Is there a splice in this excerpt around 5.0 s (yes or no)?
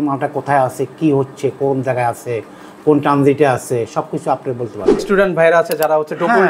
yes